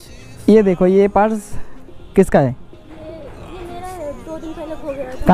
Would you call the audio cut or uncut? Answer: uncut